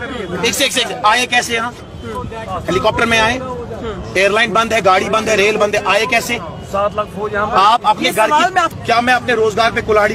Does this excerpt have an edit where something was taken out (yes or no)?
no